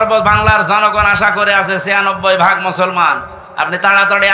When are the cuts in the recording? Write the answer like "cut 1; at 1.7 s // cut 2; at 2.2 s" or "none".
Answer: none

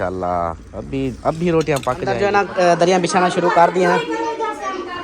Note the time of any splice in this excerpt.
cut 1; at 2.1 s

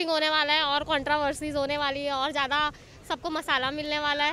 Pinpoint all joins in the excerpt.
none

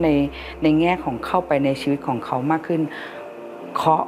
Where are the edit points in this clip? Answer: none

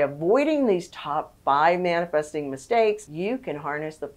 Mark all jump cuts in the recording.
cut 1; at 3.1 s

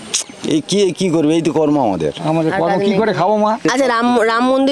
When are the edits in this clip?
cut 1; at 3.6 s

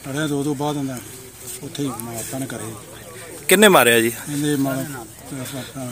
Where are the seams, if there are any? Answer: none

